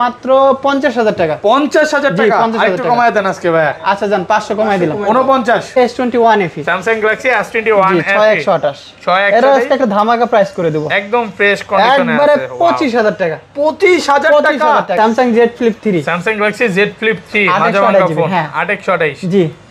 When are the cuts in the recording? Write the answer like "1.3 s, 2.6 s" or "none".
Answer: 5.8 s, 14.9 s